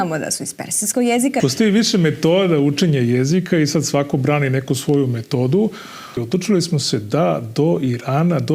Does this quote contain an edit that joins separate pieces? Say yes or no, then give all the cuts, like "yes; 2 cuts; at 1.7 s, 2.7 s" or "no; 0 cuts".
yes; 2 cuts; at 1.4 s, 6.2 s